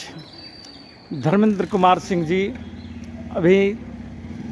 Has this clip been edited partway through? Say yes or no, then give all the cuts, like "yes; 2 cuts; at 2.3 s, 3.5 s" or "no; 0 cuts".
no; 0 cuts